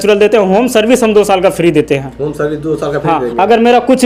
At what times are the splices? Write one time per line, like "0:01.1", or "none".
none